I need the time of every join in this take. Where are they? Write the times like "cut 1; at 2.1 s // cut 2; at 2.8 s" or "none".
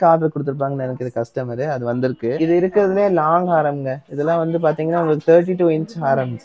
cut 1; at 2.3 s